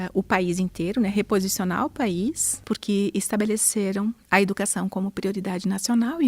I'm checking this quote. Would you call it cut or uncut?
cut